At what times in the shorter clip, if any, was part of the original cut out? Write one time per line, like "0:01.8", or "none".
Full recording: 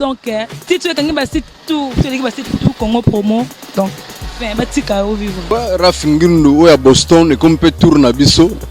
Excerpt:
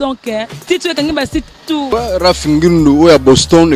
0:01.9